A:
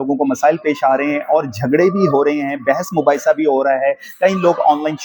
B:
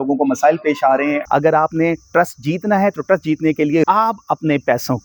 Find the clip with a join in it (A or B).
B